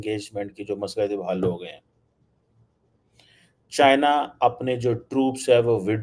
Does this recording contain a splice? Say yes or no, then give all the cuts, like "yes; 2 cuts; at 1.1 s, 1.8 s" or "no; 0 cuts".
no; 0 cuts